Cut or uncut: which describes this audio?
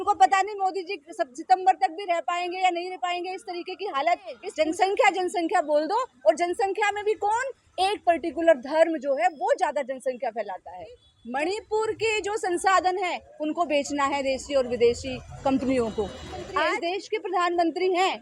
cut